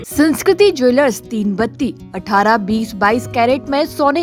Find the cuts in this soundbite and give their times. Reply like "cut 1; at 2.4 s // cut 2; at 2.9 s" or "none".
none